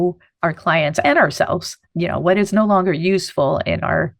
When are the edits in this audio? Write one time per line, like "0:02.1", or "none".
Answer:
0:01.8